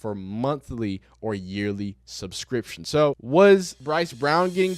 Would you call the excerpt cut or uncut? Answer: cut